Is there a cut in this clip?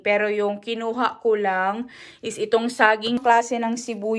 yes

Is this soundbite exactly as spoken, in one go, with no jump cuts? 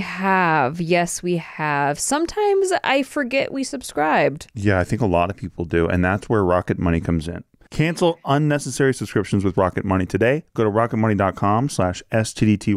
no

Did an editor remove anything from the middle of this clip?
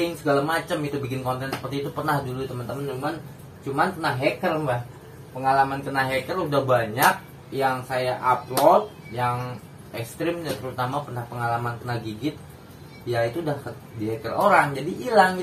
no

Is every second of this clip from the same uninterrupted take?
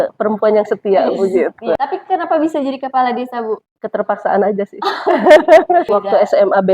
no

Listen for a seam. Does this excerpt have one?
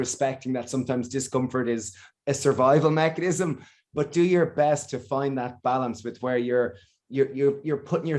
no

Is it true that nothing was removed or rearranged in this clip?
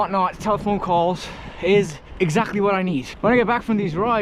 no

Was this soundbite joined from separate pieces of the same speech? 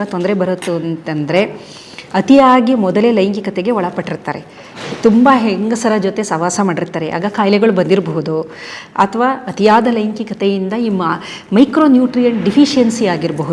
no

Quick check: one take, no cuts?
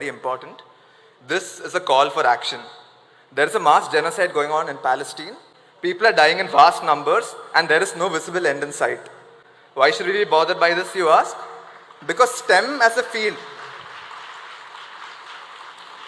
yes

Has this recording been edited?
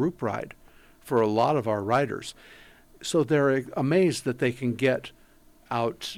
no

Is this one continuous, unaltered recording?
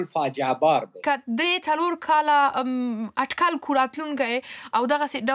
no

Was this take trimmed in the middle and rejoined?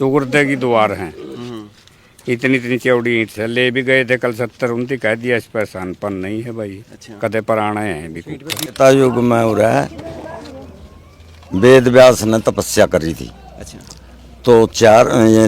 yes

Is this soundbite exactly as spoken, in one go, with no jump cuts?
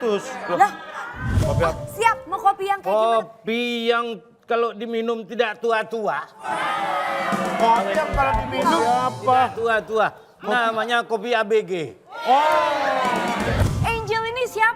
no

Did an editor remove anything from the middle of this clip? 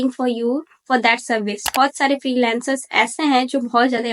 yes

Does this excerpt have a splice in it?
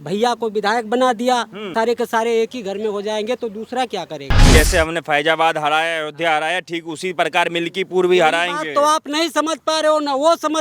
yes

